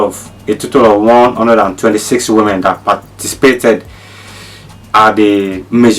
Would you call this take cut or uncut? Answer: uncut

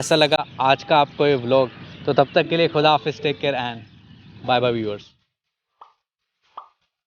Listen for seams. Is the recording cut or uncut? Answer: uncut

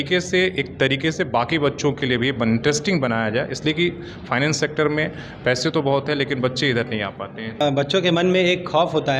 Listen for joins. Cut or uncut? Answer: cut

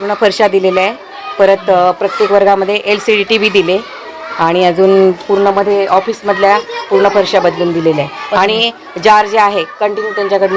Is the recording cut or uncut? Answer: uncut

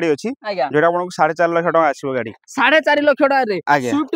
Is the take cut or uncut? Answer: uncut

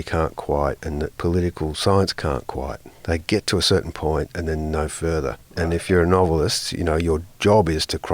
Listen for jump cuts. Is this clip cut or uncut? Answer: cut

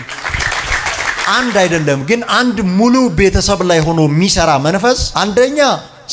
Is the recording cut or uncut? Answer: cut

